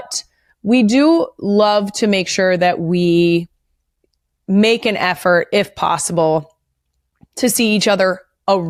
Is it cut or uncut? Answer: uncut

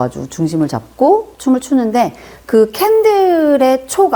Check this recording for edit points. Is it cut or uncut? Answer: uncut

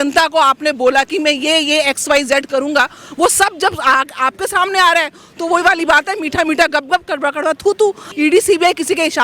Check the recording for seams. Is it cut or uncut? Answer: cut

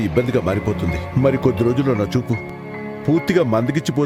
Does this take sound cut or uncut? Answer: uncut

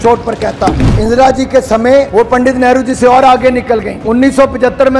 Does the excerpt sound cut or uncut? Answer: cut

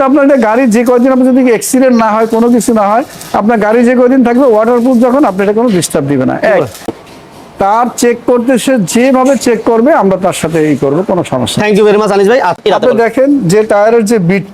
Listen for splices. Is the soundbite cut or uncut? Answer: cut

